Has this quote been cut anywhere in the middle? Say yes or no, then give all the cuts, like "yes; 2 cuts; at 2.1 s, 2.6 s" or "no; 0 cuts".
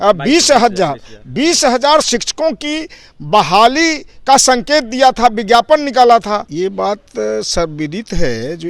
yes; 1 cut; at 6.4 s